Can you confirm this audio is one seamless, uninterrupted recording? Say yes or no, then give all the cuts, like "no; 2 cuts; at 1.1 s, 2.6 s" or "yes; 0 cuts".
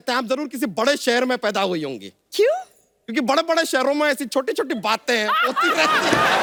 yes; 0 cuts